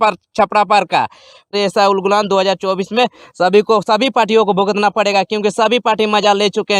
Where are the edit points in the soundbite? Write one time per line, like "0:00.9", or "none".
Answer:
0:01.5